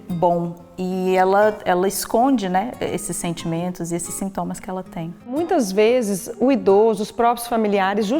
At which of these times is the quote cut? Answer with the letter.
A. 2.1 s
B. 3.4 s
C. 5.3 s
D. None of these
C